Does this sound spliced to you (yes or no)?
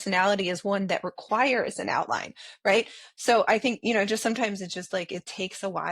no